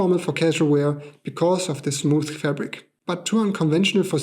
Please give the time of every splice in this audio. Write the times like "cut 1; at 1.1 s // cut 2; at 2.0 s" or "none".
cut 1; at 2.9 s

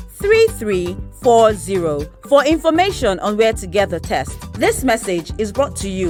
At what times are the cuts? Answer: none

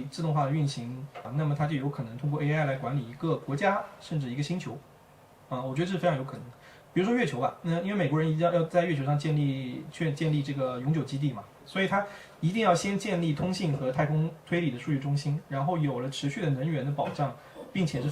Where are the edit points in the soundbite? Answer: cut 1; at 1.3 s // cut 2; at 11.6 s

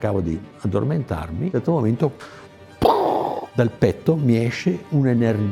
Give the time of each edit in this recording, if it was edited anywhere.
none

